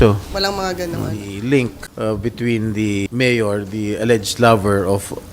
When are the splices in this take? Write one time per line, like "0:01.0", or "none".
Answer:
0:01.3
0:01.8
0:03.1